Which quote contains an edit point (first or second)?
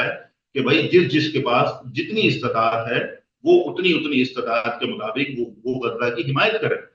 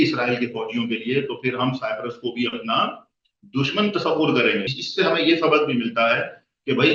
second